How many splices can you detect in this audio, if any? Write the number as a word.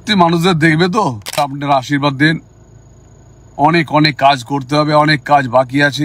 one